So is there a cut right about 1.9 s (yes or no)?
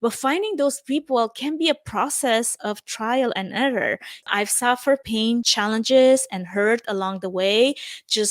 no